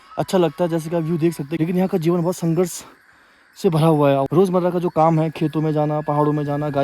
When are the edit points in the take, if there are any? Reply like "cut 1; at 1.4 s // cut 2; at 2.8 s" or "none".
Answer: cut 1; at 1.5 s // cut 2; at 4.3 s